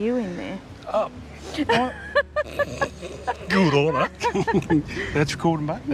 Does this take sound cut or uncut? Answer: uncut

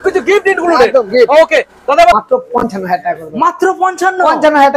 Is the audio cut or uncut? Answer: cut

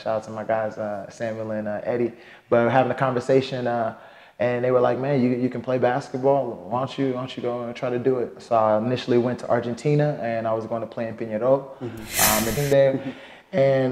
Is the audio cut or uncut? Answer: cut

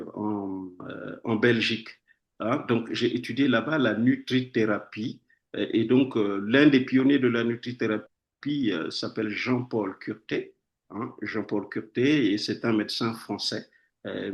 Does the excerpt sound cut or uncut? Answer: uncut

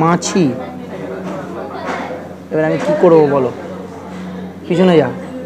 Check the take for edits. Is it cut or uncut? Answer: uncut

